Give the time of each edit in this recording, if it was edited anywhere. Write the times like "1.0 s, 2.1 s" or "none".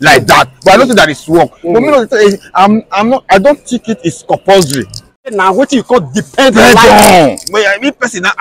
5.3 s